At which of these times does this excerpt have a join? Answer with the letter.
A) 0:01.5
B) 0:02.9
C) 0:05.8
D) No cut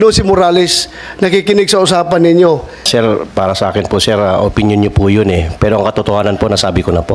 B